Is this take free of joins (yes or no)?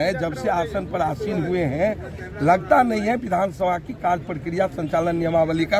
yes